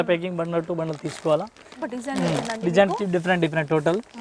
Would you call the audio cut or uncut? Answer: cut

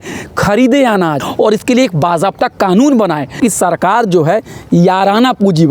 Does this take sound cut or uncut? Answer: cut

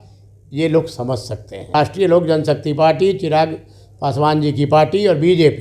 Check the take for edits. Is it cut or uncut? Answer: cut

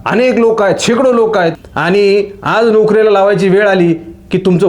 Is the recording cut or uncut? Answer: cut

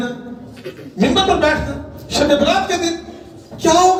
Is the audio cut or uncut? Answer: uncut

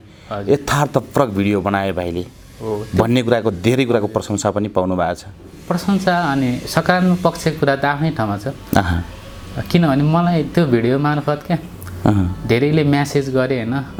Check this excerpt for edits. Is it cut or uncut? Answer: uncut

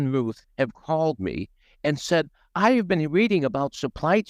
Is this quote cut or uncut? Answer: uncut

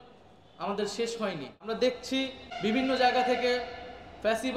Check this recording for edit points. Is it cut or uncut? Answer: cut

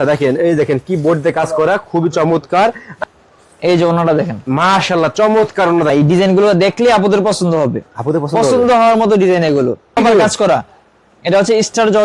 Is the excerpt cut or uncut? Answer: cut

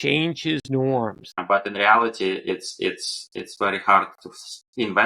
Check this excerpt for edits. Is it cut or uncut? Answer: cut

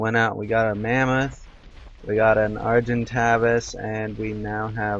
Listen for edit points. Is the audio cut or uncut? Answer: cut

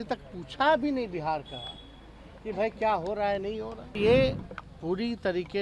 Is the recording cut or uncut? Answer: cut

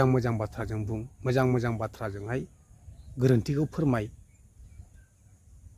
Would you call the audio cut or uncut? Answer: uncut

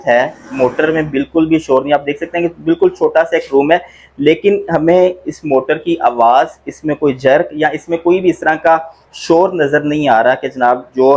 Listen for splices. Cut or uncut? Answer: uncut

